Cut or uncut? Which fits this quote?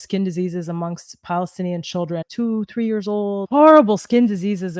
cut